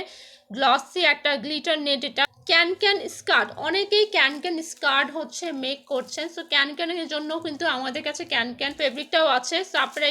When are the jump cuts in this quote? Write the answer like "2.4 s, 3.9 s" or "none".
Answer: 2.3 s, 9.2 s